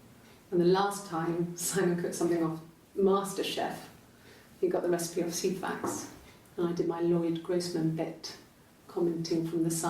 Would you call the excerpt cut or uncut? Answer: cut